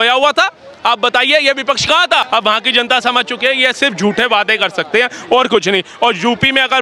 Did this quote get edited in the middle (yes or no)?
yes